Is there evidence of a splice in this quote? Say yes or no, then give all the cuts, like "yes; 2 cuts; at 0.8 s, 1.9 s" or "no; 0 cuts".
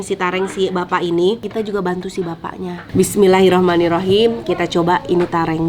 yes; 1 cut; at 1.5 s